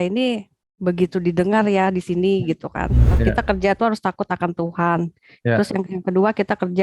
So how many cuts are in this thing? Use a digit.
1